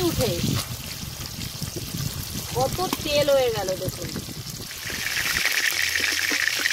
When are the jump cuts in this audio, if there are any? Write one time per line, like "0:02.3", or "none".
0:05.2